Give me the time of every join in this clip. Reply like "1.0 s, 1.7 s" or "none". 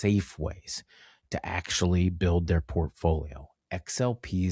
none